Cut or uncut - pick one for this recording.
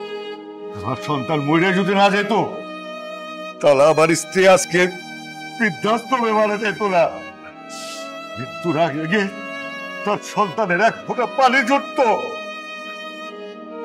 cut